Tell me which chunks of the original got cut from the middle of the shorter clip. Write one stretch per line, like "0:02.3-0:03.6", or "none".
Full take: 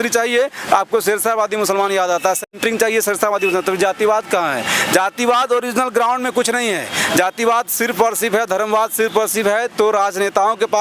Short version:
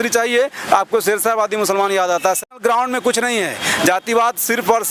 0:02.6-0:05.9